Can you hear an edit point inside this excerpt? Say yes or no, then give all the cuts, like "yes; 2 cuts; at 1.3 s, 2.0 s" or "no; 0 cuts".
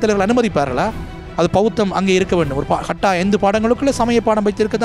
no; 0 cuts